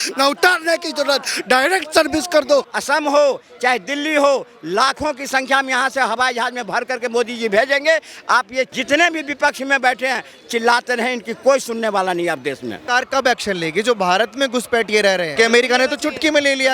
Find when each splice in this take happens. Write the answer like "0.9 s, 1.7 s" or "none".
2.7 s, 12.8 s, 15.3 s